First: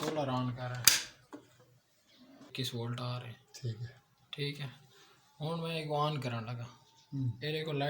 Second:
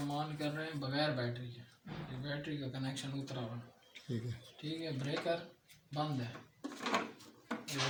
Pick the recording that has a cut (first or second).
first